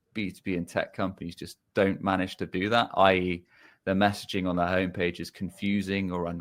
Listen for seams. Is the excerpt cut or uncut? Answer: uncut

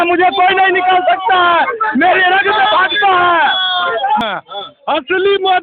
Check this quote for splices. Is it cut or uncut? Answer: cut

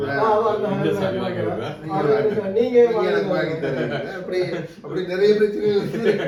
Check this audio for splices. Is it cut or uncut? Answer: uncut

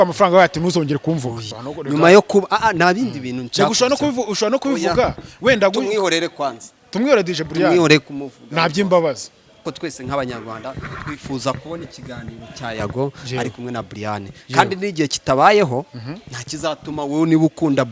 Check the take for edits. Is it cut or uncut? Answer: cut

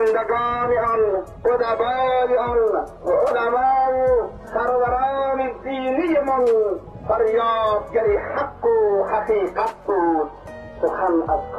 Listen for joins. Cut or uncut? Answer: cut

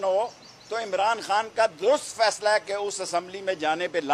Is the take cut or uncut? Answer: uncut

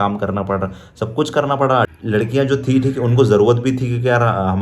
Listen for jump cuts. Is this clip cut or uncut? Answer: cut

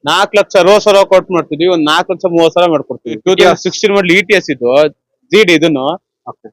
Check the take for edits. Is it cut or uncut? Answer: cut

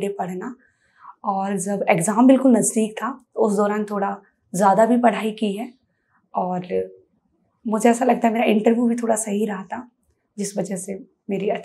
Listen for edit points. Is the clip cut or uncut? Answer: uncut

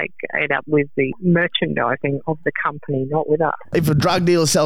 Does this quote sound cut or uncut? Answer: cut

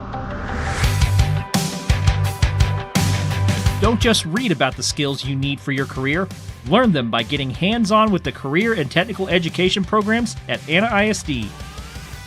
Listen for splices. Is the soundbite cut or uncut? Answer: cut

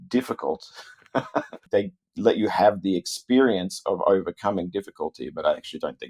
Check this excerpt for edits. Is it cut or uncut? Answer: cut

